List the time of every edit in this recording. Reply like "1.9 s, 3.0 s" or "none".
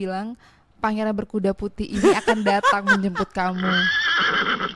none